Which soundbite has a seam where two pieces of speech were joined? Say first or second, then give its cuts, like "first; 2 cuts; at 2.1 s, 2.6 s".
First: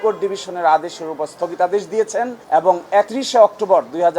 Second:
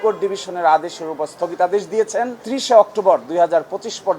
second; 1 cut; at 2.4 s